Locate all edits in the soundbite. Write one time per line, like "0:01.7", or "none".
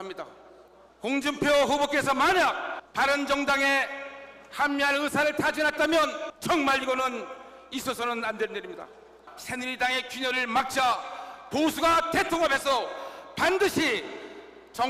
0:05.0